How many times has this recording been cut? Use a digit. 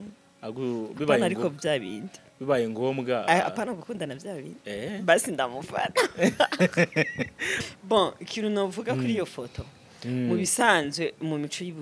1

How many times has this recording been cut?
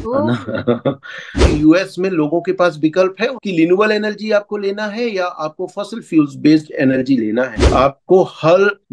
3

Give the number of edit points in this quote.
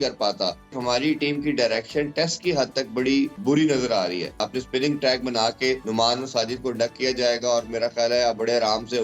4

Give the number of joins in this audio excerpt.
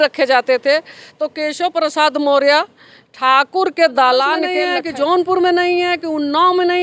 1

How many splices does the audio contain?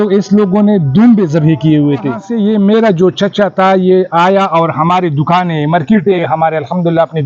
1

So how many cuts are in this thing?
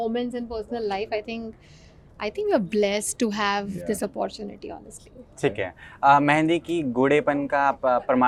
0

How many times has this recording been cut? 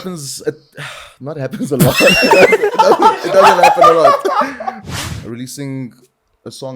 1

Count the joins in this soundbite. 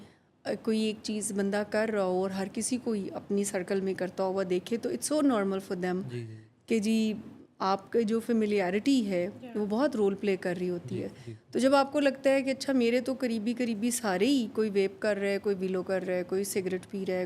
0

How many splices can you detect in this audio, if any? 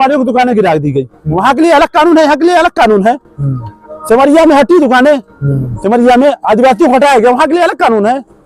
0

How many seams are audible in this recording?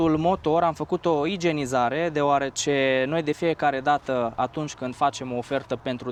0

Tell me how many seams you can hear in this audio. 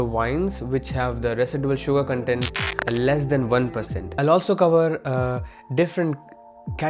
1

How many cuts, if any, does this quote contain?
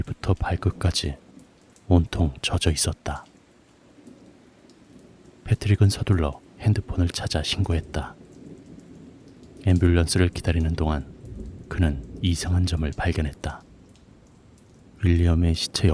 0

